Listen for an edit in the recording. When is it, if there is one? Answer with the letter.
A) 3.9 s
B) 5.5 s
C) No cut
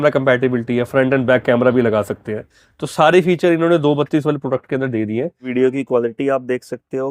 B